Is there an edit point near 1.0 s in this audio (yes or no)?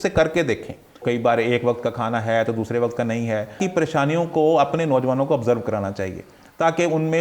yes